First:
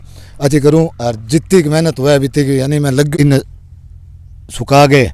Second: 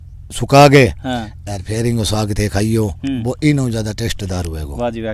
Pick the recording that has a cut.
first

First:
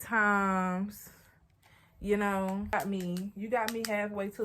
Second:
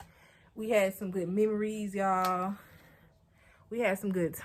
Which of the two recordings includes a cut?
first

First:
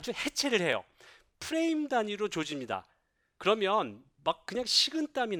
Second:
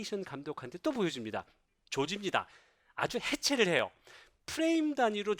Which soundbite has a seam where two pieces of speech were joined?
second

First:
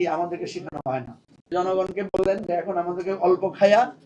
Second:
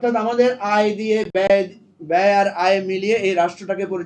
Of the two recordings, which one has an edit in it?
first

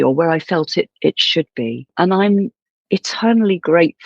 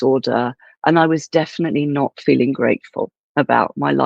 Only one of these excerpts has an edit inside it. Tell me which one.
first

